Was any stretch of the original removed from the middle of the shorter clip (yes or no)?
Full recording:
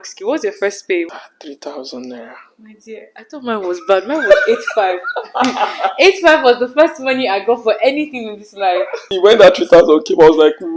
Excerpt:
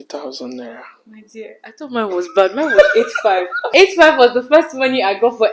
yes